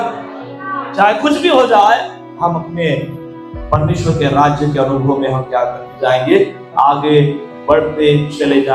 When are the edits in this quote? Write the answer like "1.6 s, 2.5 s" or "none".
none